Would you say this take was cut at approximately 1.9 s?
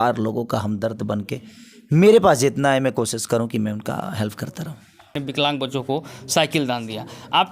no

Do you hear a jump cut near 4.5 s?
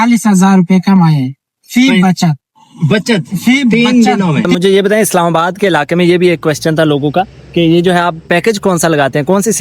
yes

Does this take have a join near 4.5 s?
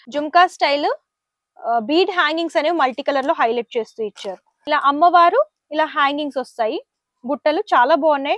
yes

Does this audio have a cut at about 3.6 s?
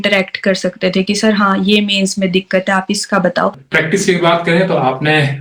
yes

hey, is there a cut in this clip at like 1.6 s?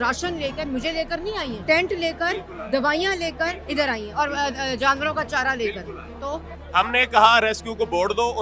yes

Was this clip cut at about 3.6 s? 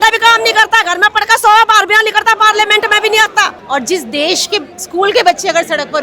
yes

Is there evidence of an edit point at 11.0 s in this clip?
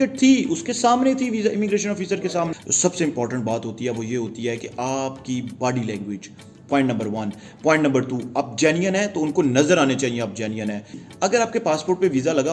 yes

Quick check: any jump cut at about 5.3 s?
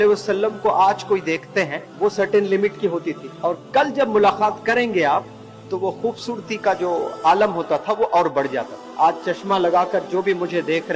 no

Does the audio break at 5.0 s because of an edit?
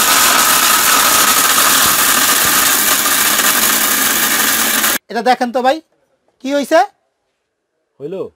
yes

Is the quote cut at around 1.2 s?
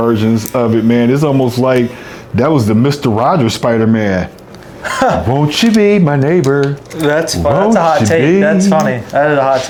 no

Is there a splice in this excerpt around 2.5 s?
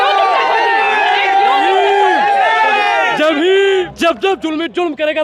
no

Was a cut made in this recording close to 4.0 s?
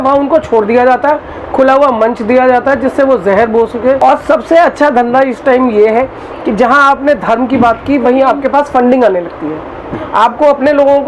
yes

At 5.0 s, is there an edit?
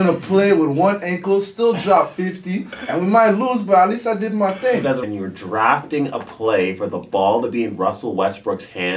yes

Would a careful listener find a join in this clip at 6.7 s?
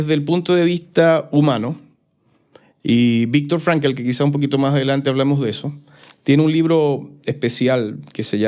no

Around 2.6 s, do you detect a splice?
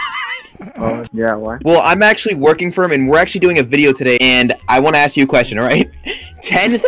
no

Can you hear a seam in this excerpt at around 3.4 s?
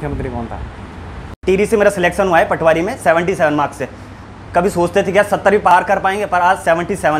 no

